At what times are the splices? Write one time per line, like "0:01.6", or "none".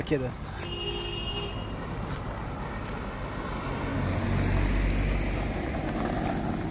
none

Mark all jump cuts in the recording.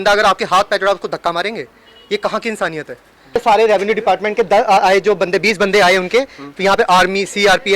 0:03.4

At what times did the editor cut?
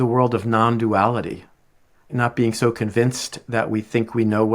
0:01.9

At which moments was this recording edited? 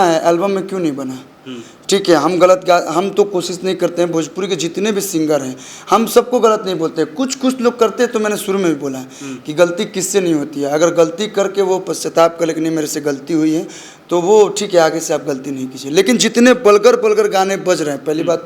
none

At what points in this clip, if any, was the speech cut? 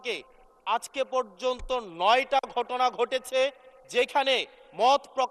none

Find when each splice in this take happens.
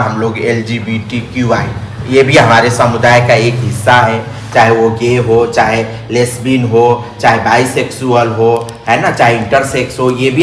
none

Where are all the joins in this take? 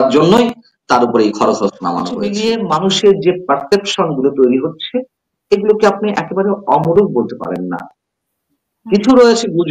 0:02.3

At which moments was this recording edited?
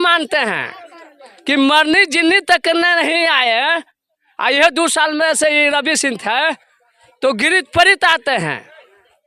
none

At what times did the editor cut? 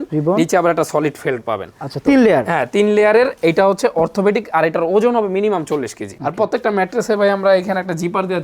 0:06.1

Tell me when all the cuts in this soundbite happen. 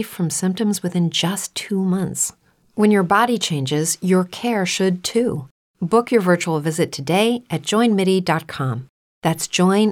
0:01.4

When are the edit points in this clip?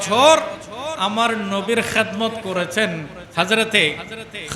0:03.2

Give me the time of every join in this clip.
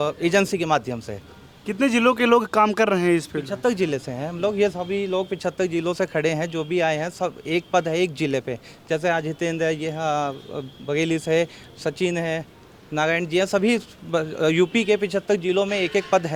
none

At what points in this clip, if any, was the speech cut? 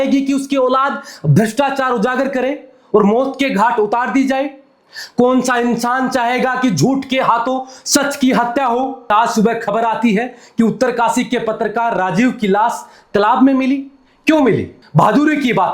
0:09.1
0:14.8

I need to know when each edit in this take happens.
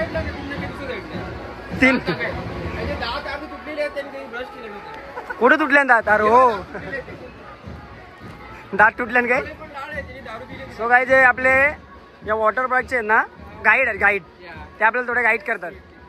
none

